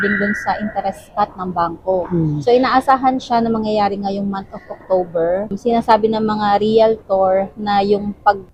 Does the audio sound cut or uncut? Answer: uncut